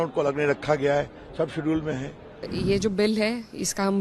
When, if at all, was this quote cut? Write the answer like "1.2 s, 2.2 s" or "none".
2.5 s

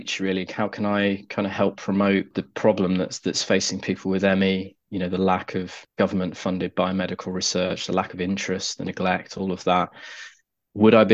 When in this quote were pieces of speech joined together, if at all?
2.4 s, 5.8 s

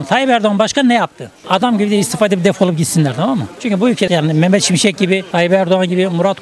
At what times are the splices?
1.4 s, 4.1 s

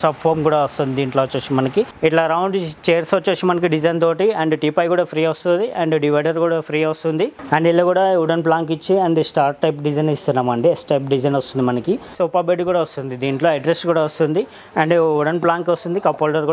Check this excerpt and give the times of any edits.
1.9 s, 7.4 s, 12.1 s

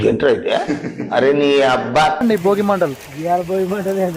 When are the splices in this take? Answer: 2.2 s

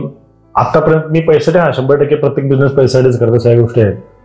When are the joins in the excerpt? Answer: none

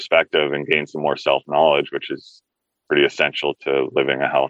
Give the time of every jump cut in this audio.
none

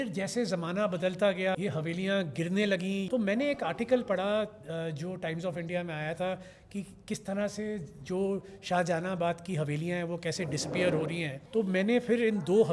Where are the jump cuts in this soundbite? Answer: 1.6 s, 3.1 s, 11.3 s

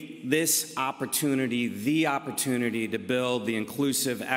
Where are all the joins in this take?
3.4 s

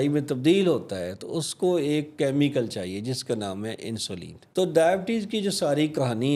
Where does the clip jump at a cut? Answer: 4.4 s

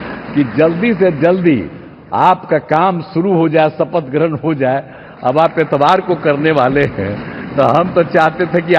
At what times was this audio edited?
none

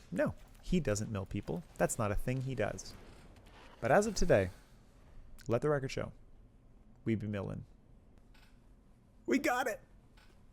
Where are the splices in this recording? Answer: 8.2 s

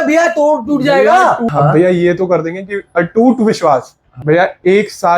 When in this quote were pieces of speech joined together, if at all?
1.5 s, 4.0 s

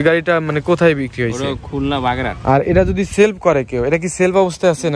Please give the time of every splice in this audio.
2.3 s

